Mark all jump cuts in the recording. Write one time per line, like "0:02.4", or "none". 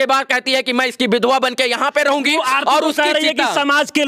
none